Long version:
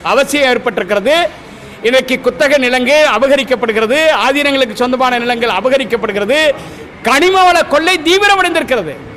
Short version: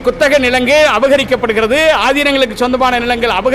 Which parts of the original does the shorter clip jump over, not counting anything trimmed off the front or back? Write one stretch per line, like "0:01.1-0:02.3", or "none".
none